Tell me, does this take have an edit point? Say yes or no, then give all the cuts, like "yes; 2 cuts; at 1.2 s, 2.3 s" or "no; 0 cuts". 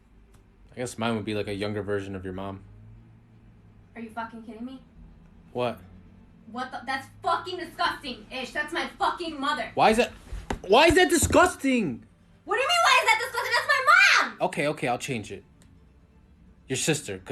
no; 0 cuts